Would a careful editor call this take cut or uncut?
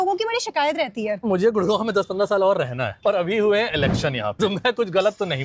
cut